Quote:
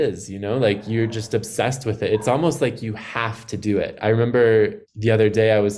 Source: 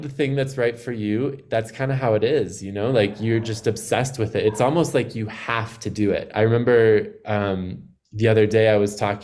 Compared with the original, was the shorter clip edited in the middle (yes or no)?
yes